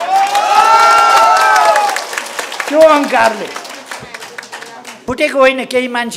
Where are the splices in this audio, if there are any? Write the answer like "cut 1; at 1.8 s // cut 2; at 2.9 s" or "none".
cut 1; at 5.0 s